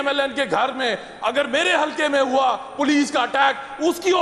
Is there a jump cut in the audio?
no; 0 cuts

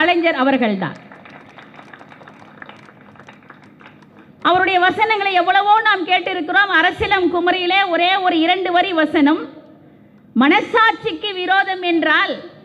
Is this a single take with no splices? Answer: yes; 0 cuts

